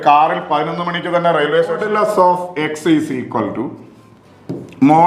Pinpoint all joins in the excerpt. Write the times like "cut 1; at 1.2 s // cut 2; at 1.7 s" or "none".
cut 1; at 1.9 s